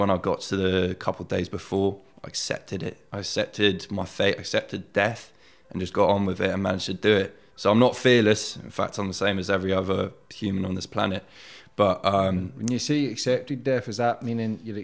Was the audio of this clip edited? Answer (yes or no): no